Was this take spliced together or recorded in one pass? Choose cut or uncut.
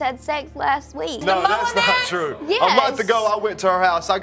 cut